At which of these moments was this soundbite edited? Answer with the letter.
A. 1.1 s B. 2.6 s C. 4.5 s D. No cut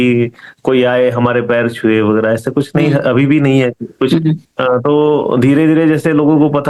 C